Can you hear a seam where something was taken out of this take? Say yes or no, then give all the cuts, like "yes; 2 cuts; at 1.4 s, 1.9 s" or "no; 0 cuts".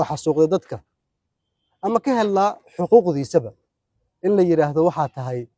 no; 0 cuts